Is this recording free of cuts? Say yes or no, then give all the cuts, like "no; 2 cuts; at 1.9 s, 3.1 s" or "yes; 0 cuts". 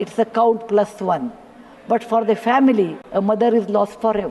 no; 1 cut; at 3.0 s